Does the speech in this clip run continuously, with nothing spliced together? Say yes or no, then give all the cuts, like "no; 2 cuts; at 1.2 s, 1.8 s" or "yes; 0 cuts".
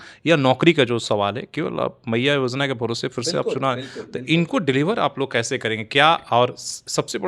yes; 0 cuts